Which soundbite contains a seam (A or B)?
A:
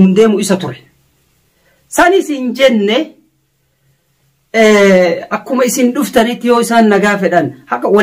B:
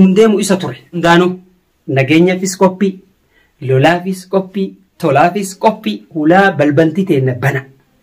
B